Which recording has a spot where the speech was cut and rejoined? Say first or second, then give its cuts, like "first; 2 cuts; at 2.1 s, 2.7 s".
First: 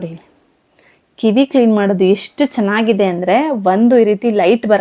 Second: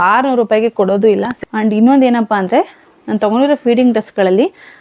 second; 1 cut; at 1.4 s